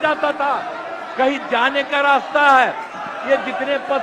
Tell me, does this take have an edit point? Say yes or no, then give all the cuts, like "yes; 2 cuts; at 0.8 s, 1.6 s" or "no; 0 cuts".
no; 0 cuts